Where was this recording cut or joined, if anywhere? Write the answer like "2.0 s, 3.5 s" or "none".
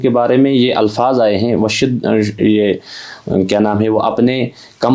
none